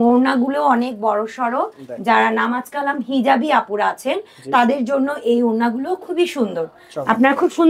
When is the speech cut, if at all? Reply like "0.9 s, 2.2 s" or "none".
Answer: none